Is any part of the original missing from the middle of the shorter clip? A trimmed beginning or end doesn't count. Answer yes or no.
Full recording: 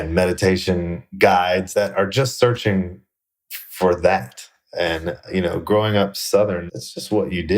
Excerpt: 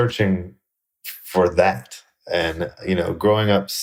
no